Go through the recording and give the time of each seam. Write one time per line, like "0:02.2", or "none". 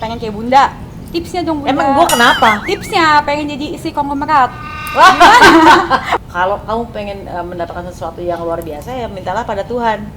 0:06.1